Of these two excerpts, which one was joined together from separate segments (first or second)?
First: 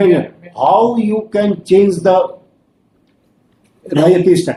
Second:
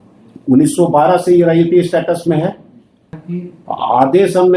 second